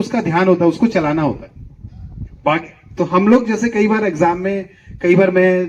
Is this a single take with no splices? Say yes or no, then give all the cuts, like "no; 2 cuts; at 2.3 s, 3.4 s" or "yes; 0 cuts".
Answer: yes; 0 cuts